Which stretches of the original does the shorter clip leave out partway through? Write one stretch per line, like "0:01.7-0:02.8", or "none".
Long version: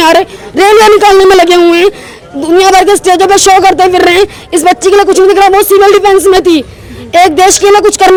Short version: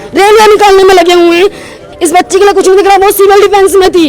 0:02.3-0:04.4